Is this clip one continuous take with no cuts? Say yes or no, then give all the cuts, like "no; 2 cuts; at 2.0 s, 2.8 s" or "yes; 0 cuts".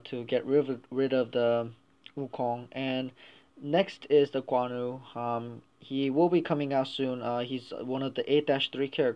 yes; 0 cuts